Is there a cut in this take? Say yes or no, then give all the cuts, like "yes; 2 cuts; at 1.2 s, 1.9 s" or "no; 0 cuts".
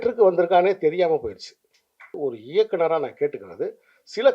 yes; 1 cut; at 2.1 s